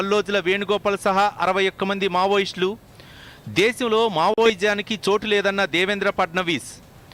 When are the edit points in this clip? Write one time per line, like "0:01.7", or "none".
none